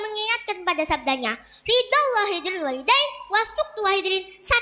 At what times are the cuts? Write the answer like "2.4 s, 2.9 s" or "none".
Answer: none